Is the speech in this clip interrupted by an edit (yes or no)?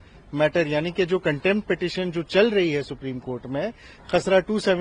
no